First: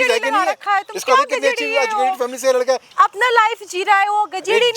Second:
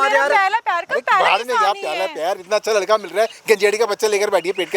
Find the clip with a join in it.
first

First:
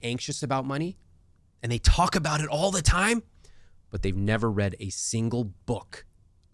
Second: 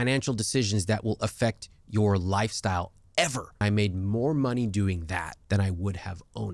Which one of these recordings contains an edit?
second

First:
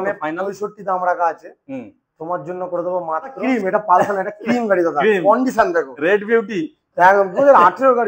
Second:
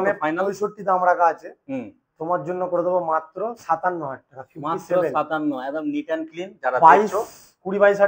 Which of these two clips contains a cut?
first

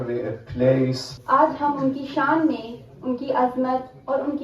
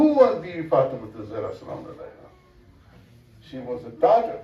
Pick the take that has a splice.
first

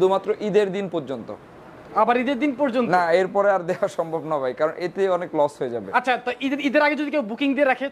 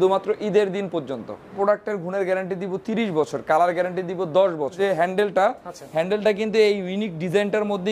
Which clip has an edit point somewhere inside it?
second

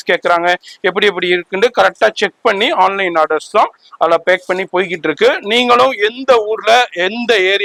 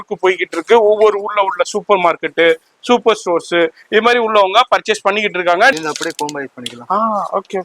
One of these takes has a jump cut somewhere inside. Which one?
second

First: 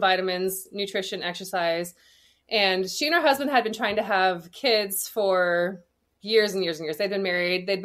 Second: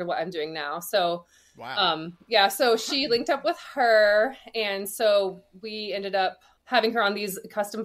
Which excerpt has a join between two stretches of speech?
second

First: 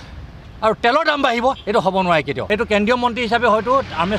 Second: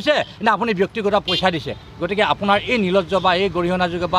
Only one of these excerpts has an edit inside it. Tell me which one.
first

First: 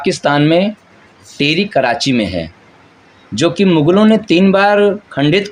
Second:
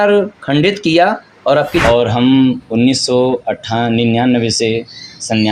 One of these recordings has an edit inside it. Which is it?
second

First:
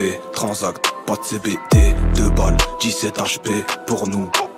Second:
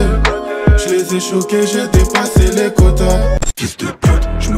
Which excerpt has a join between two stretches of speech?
second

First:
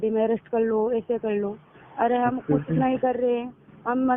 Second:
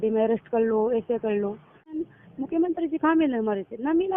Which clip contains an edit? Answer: second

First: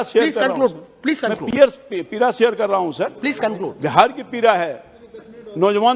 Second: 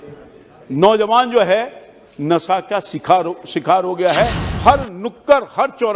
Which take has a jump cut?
second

